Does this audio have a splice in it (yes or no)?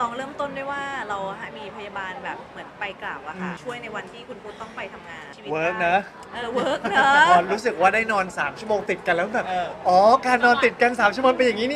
yes